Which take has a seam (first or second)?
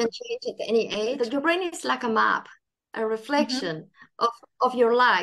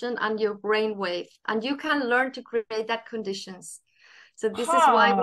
first